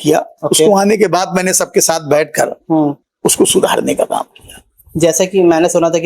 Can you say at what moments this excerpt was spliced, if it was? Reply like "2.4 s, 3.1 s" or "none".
3.1 s